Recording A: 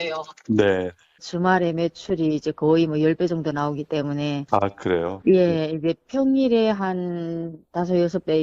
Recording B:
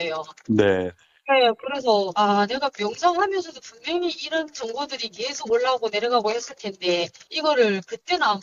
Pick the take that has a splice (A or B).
A